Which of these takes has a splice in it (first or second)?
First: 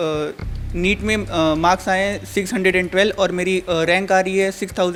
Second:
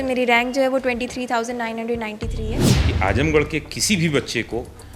second